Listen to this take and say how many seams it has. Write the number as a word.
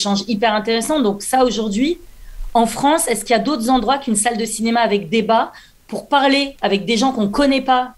zero